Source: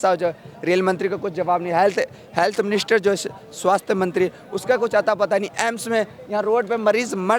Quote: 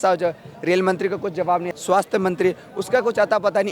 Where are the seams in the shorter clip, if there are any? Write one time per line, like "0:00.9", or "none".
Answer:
0:01.7